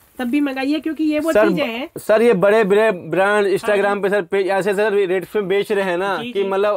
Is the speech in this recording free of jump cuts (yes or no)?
yes